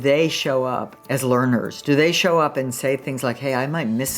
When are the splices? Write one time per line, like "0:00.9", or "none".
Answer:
0:00.9